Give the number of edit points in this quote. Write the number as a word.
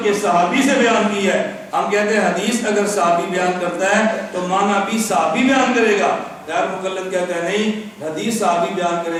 zero